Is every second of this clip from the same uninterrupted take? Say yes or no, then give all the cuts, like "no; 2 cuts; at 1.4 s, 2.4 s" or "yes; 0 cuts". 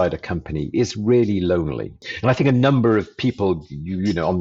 no; 1 cut; at 2.1 s